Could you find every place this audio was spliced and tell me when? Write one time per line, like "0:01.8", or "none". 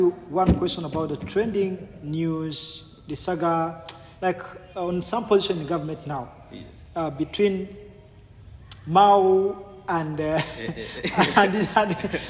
none